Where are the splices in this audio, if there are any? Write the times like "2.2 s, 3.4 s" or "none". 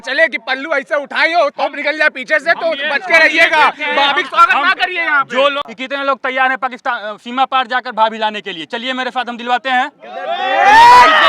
5.6 s